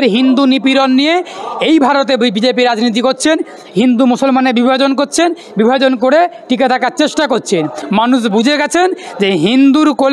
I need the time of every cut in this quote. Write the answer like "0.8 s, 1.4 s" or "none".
7.8 s